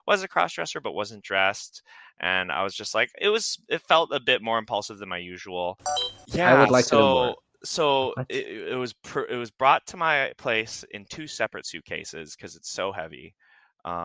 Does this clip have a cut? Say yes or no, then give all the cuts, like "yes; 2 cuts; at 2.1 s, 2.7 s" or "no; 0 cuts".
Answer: yes; 1 cut; at 6.1 s